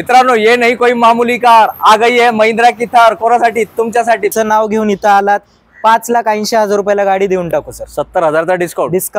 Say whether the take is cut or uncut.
cut